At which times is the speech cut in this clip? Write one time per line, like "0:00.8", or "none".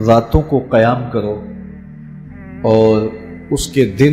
none

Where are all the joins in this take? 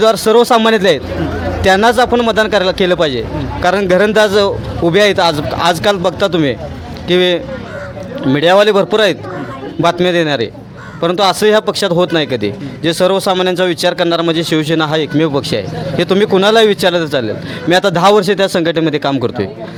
none

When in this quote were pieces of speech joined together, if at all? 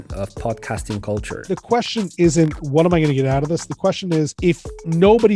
0:01.3
0:04.3

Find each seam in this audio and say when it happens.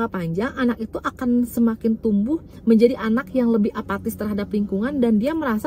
none

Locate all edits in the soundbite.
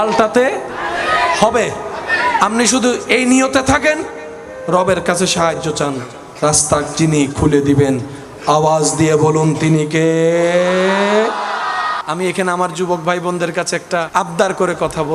0:12.0
0:14.1

